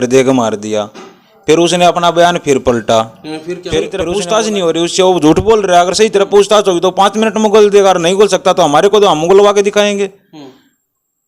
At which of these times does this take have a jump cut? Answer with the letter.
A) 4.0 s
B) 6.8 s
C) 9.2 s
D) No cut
A